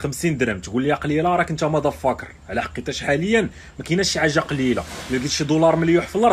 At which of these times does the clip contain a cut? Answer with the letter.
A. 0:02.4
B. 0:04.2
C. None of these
C